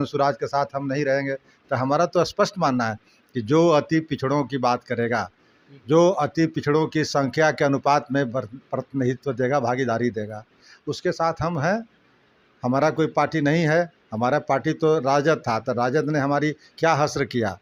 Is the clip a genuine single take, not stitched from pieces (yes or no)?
yes